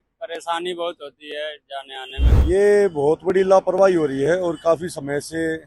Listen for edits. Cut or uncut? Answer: cut